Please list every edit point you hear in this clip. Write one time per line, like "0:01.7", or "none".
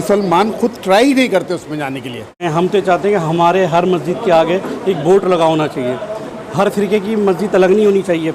0:02.5